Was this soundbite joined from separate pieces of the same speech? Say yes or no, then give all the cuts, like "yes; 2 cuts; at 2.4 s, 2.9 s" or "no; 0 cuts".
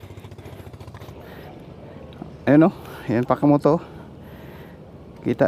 yes; 1 cut; at 1.1 s